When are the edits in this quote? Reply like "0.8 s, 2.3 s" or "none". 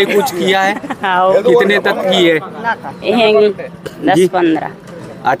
none